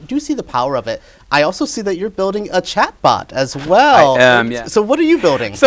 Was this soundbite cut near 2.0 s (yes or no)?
no